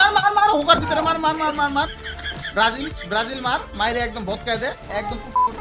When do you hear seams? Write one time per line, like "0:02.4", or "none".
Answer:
none

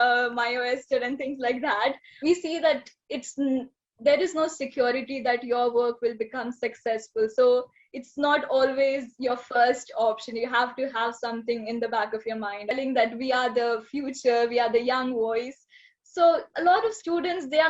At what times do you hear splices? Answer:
0:02.1
0:12.7

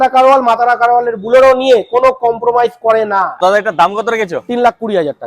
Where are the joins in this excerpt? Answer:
0:03.4

